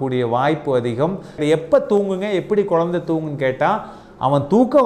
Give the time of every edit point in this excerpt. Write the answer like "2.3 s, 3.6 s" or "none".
1.3 s